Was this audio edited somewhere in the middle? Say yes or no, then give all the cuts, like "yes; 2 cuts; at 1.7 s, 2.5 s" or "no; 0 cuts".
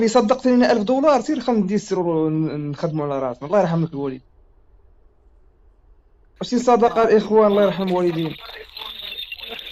no; 0 cuts